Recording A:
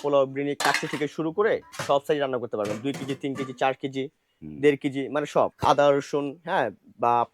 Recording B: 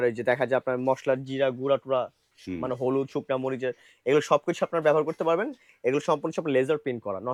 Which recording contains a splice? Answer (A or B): A